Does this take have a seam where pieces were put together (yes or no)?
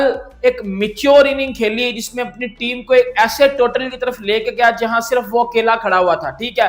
no